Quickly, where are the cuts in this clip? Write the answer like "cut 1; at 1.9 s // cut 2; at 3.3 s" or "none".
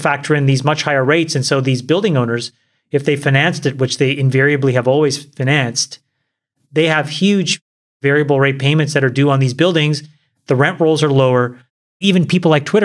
none